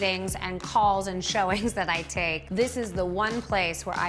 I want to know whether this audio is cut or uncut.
uncut